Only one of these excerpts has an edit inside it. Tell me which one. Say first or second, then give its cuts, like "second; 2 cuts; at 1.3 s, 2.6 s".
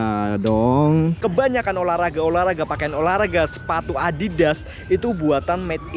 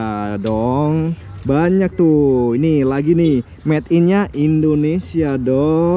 first; 1 cut; at 1.2 s